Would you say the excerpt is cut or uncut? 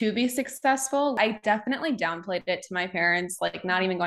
cut